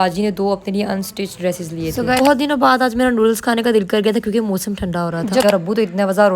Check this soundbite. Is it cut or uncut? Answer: cut